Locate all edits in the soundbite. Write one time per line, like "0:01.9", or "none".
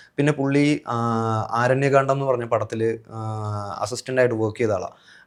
none